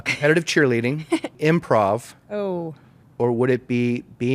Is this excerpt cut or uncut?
cut